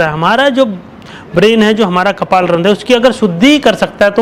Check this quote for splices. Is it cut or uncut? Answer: uncut